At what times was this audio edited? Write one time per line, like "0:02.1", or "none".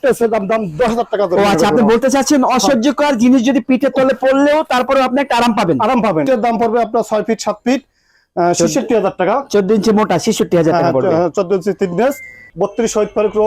0:06.3
0:12.4